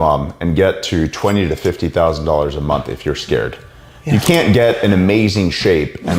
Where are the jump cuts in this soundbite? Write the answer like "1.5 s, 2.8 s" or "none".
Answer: none